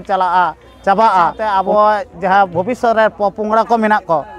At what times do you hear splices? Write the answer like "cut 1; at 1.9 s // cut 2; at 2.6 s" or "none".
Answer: cut 1; at 1.4 s